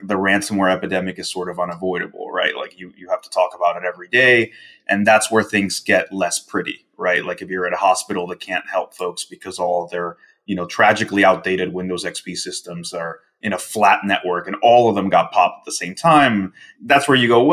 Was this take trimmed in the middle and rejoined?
no; 0 cuts

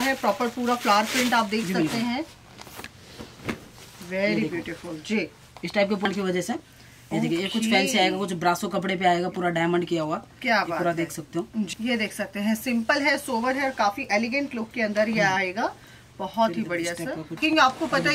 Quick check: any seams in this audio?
yes; 3 cuts; at 6.1 s, 11.7 s, 17.4 s

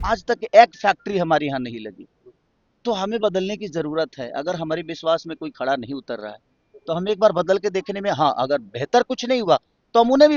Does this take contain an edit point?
no; 0 cuts

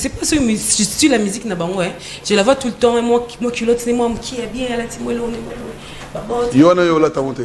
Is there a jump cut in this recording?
no; 0 cuts

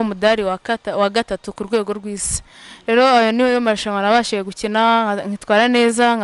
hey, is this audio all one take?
yes; 0 cuts

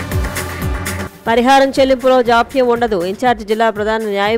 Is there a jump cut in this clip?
yes; 1 cut; at 1.0 s

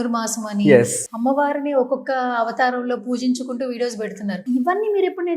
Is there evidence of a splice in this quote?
yes; 2 cuts; at 1.0 s, 4.4 s

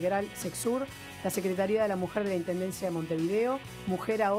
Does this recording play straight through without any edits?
no; 1 cut; at 2.8 s

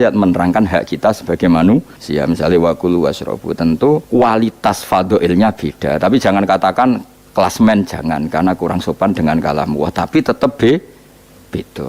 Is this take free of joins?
no; 3 cuts; at 2.0 s, 4.0 s, 7.2 s

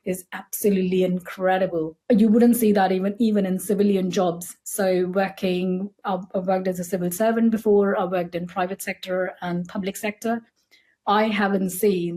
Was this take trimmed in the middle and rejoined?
yes; 1 cut; at 2.0 s

